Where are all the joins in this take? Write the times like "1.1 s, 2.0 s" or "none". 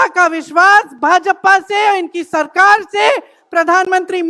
none